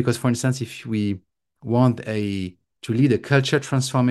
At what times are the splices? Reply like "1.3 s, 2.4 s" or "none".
none